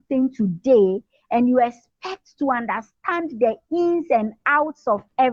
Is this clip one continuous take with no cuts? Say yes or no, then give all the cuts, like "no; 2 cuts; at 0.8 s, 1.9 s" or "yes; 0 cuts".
yes; 0 cuts